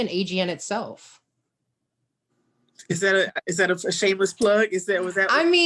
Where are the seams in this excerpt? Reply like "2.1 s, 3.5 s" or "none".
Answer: none